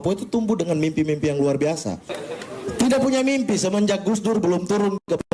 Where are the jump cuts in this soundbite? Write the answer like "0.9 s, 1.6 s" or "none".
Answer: 2.2 s

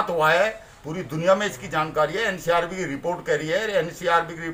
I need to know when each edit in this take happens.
none

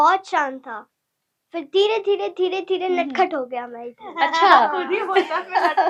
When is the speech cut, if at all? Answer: none

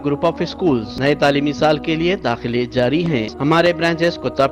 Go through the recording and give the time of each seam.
0.9 s, 3.3 s

